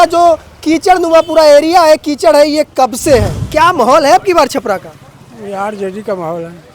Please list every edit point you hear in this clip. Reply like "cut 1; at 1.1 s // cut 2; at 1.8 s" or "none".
cut 1; at 3.3 s